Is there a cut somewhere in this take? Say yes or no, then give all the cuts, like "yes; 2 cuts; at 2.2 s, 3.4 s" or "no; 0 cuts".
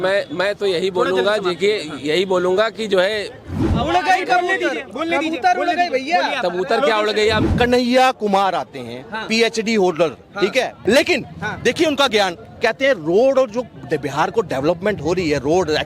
yes; 3 cuts; at 3.6 s, 7.4 s, 10.8 s